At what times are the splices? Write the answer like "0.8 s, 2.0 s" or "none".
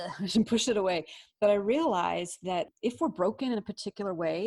2.7 s